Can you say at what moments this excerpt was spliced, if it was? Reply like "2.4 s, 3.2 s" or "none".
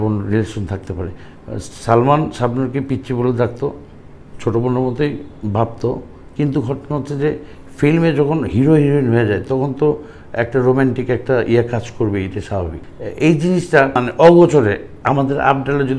12.8 s, 14.0 s